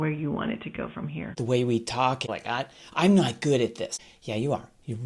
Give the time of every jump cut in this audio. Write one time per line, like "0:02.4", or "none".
0:01.4
0:02.3
0:04.0